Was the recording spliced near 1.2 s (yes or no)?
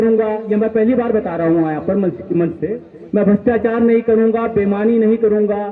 no